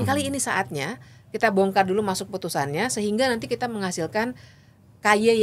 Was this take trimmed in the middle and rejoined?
no; 0 cuts

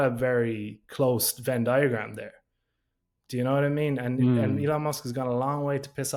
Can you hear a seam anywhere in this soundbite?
no; 0 cuts

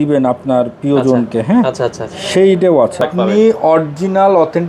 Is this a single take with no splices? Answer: no; 1 cut; at 3.0 s

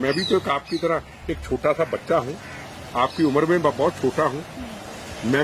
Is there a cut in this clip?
no; 0 cuts

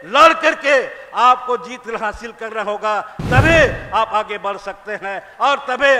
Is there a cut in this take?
no; 0 cuts

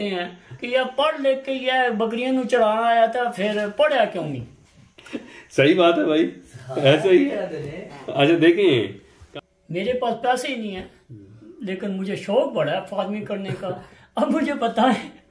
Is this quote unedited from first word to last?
no; 1 cut; at 9.1 s

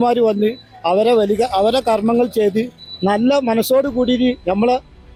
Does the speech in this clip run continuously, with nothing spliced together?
yes; 0 cuts

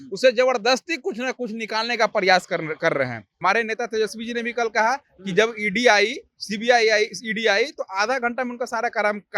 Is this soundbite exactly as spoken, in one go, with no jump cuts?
no; 1 cut; at 3.2 s

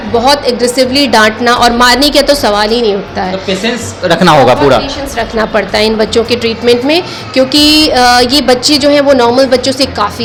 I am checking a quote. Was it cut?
no; 0 cuts

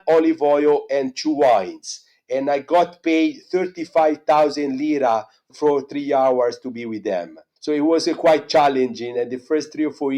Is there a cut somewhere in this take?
no; 0 cuts

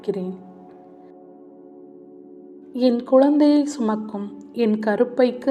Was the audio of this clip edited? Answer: no; 0 cuts

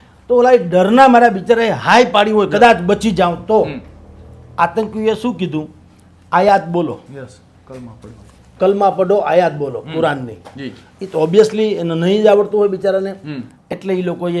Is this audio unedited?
yes; 0 cuts

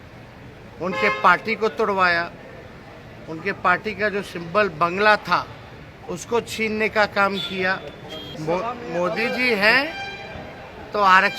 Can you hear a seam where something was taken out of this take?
yes; 1 cut; at 8.3 s

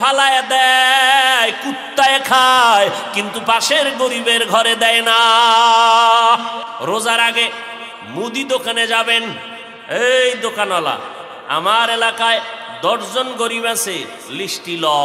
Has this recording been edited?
yes; 1 cut; at 6.7 s

